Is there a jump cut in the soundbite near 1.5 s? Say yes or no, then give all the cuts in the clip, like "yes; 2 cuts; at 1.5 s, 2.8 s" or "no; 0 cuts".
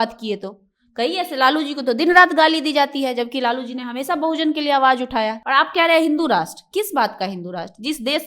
no; 1 cut; at 5.4 s